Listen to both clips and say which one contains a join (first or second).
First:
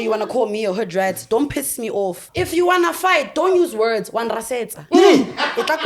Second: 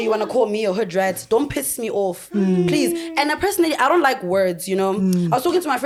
first